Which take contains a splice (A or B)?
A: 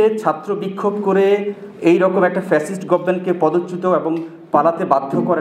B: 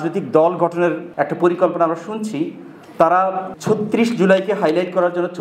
B